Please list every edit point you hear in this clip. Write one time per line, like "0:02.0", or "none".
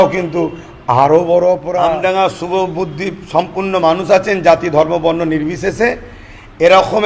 0:01.9